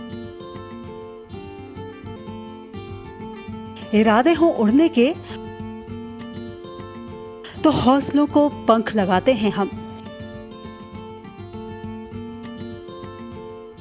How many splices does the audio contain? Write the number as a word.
one